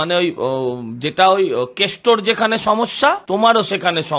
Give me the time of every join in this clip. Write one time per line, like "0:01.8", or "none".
0:03.2